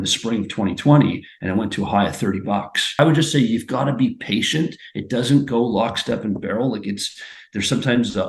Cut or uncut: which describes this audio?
cut